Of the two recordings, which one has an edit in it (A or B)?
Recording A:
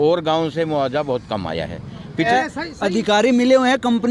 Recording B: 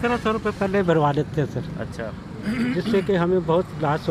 A